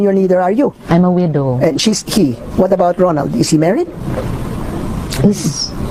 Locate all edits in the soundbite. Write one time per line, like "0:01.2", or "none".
none